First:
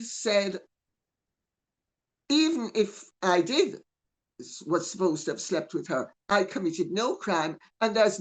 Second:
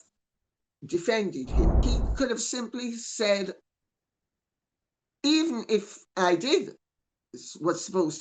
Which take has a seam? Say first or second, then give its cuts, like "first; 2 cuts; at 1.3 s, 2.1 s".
second; 1 cut; at 1.8 s